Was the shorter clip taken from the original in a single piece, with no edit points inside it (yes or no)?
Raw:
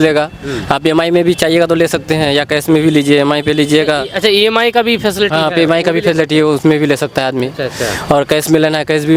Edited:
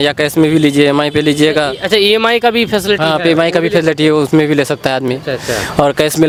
yes